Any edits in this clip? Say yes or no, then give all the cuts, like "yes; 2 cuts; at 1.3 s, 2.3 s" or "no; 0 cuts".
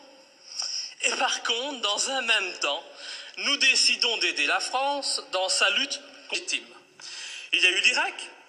no; 0 cuts